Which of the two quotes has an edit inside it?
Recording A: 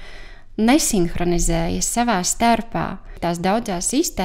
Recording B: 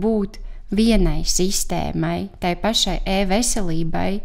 A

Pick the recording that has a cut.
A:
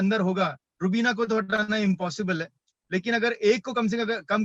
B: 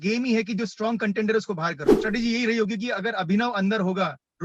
B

